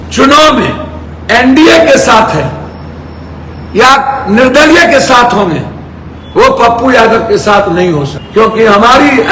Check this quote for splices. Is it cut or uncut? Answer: uncut